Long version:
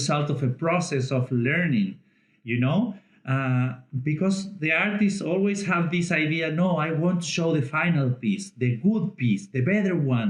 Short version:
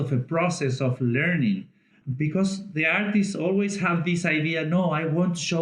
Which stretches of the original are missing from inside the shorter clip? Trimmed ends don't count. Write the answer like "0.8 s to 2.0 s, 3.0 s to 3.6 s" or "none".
2.3 s to 3.8 s